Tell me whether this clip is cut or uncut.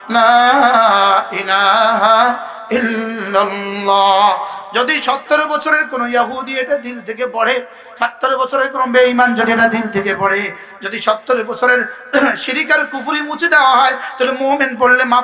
uncut